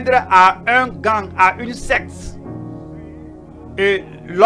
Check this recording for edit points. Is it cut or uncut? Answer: cut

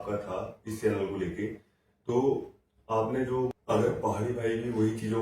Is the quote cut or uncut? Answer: cut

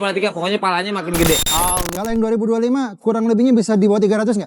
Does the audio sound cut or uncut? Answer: cut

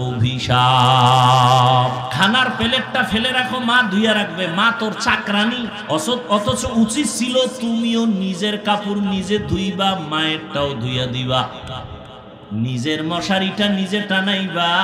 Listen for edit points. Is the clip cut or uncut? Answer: cut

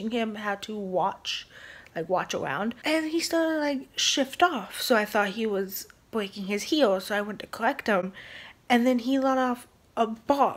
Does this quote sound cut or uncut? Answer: cut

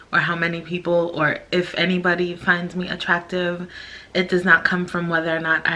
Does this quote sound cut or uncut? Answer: uncut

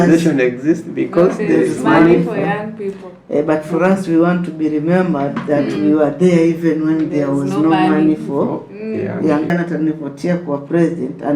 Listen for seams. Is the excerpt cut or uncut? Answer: cut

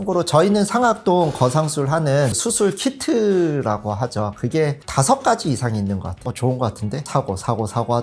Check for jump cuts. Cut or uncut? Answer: cut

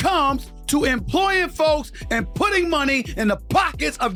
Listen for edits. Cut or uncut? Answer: uncut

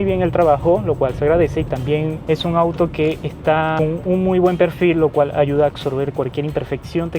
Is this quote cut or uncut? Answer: cut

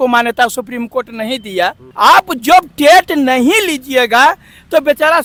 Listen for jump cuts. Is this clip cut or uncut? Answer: uncut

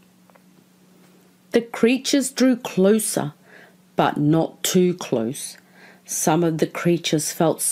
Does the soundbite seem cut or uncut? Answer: uncut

